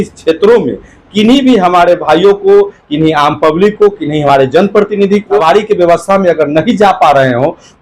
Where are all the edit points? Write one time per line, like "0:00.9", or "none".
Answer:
0:05.4